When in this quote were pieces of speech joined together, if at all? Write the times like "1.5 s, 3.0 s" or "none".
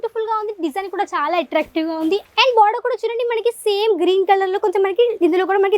2.3 s